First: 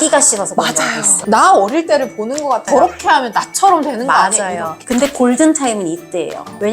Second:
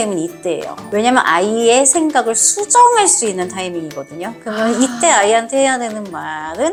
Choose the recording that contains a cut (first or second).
first